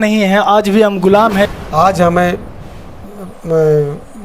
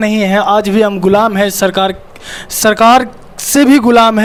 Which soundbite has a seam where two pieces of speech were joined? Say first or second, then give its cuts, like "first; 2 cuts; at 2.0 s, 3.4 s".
first; 1 cut; at 1.5 s